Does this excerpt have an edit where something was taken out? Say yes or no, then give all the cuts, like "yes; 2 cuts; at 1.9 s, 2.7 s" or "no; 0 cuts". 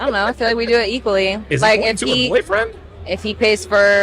yes; 1 cut; at 1.6 s